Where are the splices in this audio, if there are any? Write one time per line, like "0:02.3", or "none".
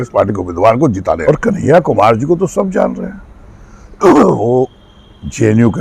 0:01.2